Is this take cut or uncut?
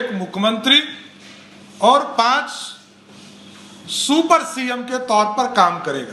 uncut